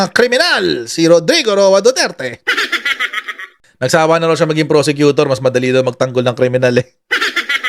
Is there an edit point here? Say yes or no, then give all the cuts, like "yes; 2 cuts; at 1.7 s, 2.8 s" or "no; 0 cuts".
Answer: no; 0 cuts